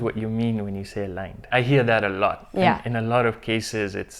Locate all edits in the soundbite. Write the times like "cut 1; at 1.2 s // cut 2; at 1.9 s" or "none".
cut 1; at 1.4 s